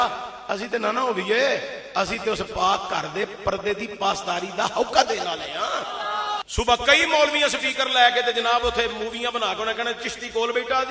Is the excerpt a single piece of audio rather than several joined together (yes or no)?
no